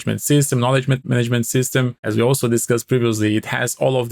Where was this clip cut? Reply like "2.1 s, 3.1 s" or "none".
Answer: 1.0 s, 2.0 s